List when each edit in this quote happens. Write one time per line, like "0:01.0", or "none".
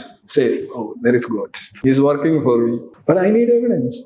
0:01.7
0:02.9